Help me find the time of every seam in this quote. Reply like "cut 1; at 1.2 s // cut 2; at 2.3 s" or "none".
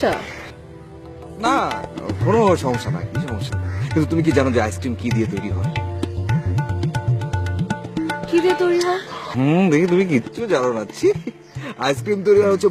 cut 1; at 8.9 s